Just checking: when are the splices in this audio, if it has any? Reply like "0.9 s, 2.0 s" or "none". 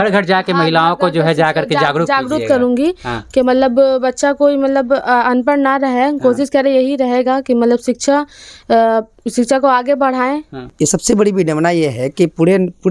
10.7 s